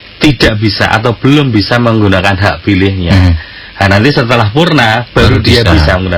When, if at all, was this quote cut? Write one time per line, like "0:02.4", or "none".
none